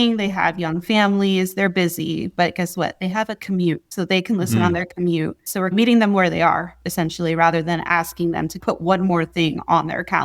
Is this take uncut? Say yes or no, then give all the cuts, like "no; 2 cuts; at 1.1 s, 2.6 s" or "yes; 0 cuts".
no; 1 cut; at 8.6 s